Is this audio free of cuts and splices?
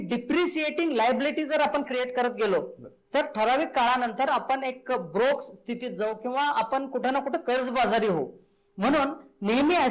yes; 0 cuts

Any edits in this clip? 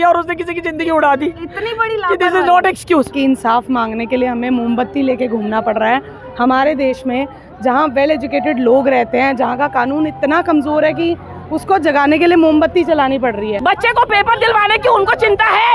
yes; 2 cuts; at 3.1 s, 13.5 s

